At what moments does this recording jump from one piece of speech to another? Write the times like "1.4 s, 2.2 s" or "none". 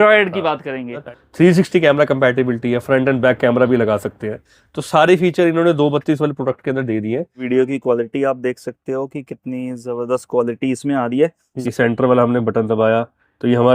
1.1 s, 7.4 s, 11.5 s